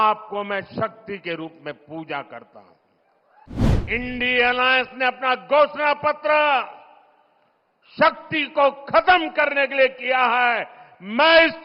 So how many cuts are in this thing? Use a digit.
1